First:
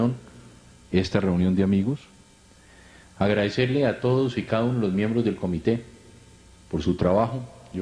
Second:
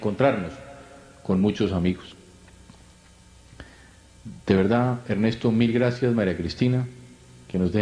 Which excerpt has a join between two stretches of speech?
first; 1 cut; at 5.1 s

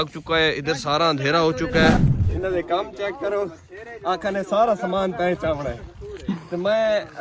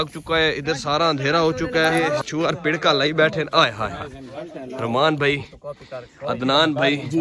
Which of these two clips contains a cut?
first; 1 cut; at 1.9 s

